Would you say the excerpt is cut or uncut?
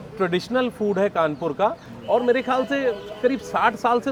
uncut